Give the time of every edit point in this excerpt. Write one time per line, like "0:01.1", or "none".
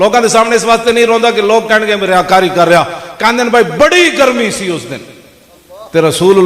none

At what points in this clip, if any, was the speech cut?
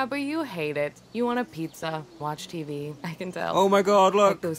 none

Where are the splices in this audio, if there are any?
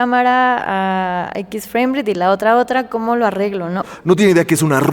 0:03.8

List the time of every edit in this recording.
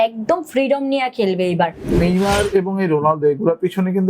0:02.0

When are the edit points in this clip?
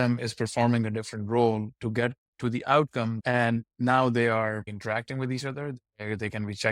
0:03.2

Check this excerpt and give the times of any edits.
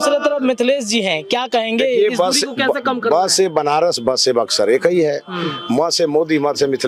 none

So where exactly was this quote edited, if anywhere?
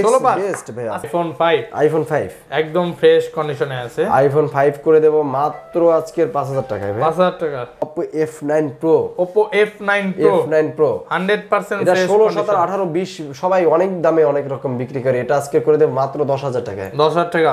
0:01.1
0:07.9

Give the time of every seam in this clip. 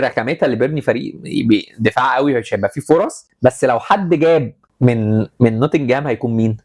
0:03.2
0:04.6

